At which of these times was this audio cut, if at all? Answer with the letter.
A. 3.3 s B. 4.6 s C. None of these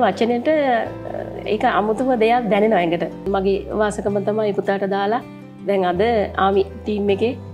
A